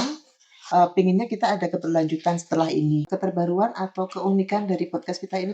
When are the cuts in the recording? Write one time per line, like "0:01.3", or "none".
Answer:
0:03.1